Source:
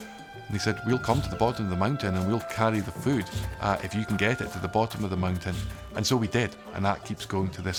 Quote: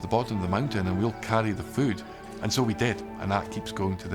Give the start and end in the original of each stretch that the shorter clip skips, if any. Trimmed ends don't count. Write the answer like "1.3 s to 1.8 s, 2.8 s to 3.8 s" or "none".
3.4 s to 5.7 s